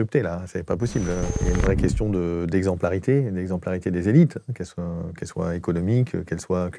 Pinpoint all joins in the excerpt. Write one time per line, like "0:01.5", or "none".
0:01.4